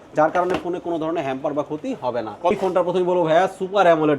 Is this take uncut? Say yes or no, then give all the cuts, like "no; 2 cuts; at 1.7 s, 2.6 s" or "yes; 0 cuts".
no; 1 cut; at 2.5 s